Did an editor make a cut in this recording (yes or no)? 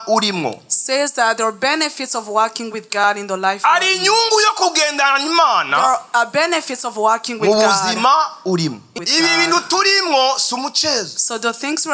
yes